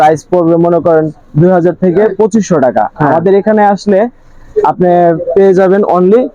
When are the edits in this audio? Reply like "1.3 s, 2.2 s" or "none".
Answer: none

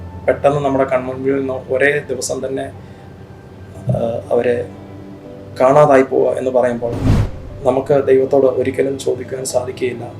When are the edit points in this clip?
7.0 s

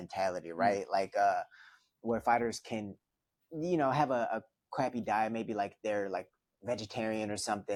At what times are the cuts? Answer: none

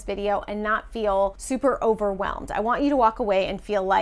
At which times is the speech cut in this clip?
1.4 s

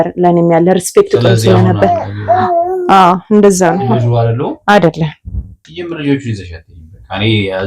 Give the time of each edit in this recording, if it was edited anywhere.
5.5 s

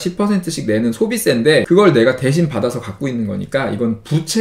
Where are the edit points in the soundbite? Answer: 1.6 s

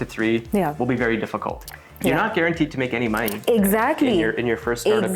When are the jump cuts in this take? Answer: none

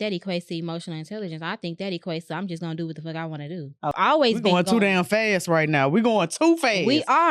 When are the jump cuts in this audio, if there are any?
3.9 s

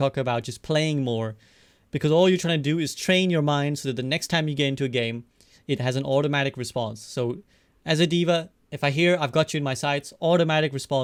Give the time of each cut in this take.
none

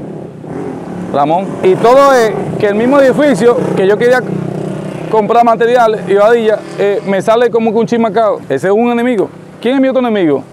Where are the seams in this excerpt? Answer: none

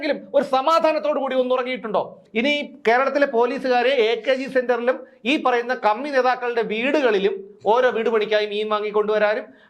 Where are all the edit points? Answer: 2.2 s

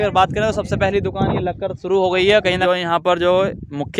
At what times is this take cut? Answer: 2.6 s

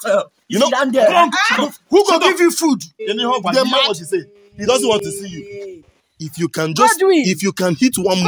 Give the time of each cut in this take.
none

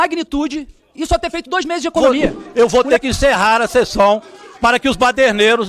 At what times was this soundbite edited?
2.0 s

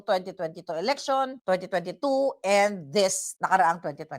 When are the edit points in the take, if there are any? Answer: 3.2 s

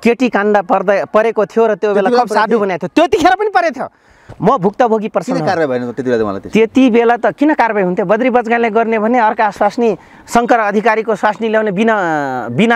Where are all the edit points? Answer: none

